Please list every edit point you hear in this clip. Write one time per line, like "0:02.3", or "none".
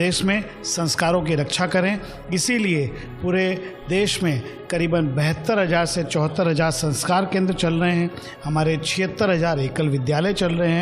none